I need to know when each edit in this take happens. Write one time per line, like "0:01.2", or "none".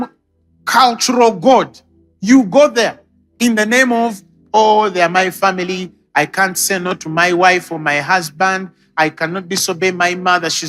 none